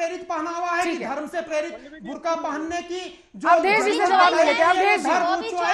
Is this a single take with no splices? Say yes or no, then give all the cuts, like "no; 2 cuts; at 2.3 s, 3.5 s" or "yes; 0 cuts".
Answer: yes; 0 cuts